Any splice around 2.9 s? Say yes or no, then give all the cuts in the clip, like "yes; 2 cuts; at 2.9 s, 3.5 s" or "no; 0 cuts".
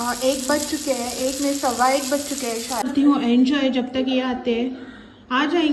yes; 1 cut; at 2.9 s